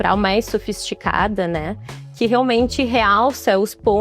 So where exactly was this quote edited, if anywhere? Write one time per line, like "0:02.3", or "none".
none